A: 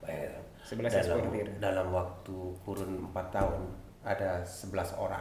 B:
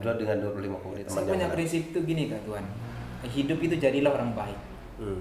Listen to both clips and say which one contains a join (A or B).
B